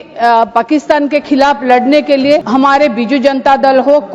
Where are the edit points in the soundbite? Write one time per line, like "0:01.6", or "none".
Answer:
0:02.4